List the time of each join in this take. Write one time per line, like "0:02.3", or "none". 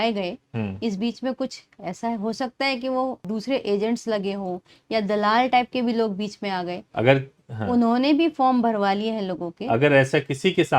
none